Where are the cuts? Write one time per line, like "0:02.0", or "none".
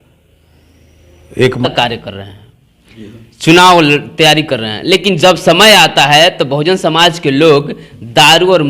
0:01.7